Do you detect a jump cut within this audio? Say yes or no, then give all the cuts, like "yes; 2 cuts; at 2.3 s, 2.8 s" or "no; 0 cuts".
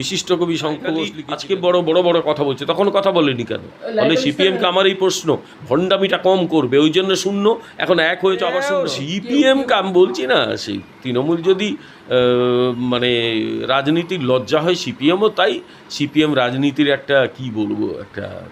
yes; 2 cuts; at 1.2 s, 8.7 s